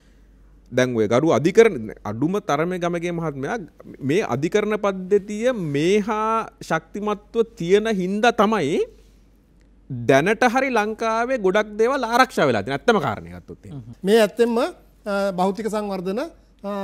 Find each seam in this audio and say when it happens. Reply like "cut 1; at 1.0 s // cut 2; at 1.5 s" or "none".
cut 1; at 13.9 s

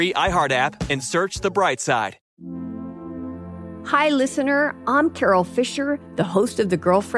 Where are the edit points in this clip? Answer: cut 1; at 2.2 s

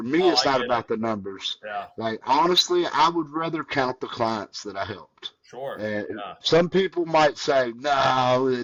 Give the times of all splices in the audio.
none

